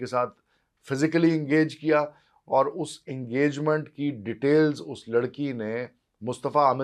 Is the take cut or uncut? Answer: uncut